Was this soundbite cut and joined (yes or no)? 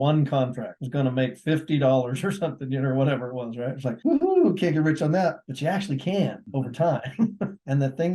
no